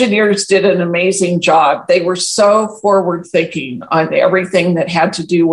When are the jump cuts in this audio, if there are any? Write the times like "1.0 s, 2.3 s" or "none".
none